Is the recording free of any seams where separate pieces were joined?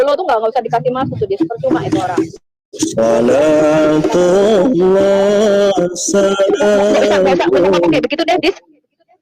yes; 0 cuts

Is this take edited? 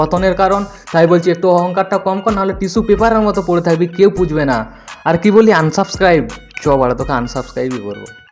no; 0 cuts

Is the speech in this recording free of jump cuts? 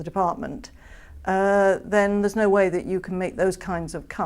yes; 0 cuts

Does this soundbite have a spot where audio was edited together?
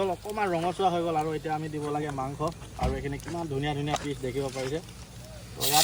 no; 0 cuts

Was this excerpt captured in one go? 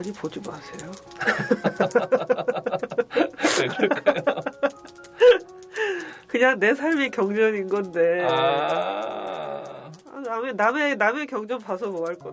yes; 0 cuts

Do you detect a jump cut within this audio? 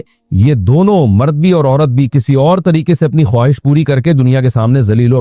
no; 0 cuts

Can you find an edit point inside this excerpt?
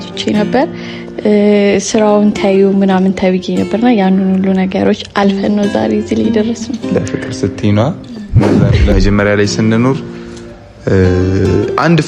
yes; 1 cut; at 8.6 s

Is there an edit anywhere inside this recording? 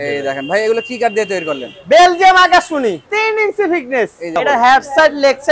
yes; 2 cuts; at 3.0 s, 4.3 s

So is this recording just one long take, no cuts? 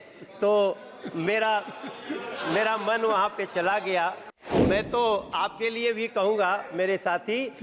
no; 1 cut; at 4.6 s

